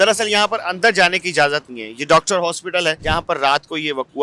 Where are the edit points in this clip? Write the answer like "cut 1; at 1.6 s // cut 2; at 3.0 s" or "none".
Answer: cut 1; at 3.0 s